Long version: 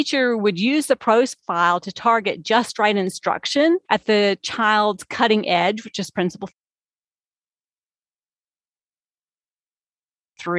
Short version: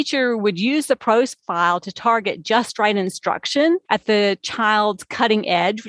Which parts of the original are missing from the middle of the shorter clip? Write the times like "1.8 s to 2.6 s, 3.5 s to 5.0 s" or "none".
none